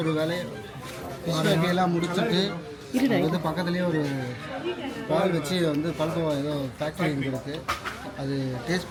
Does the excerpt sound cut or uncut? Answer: uncut